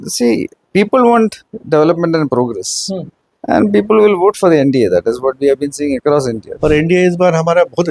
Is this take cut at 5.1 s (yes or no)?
no